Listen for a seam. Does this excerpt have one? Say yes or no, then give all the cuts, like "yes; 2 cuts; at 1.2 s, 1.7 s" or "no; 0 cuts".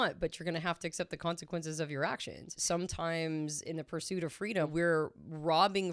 yes; 2 cuts; at 2.6 s, 4.7 s